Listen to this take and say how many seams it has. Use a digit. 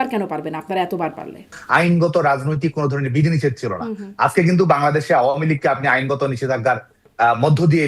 1